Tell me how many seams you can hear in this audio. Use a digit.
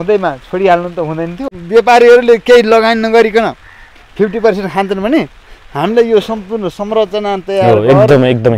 1